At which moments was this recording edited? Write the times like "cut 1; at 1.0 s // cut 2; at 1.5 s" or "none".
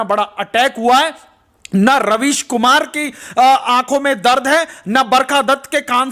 none